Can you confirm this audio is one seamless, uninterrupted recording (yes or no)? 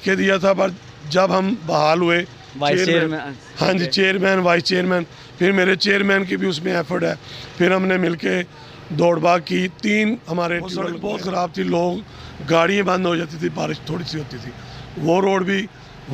no